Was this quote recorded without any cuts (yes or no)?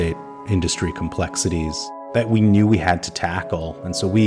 no